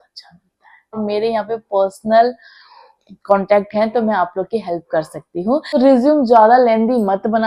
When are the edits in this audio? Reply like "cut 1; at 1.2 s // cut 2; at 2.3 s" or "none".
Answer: cut 1; at 1.0 s // cut 2; at 5.7 s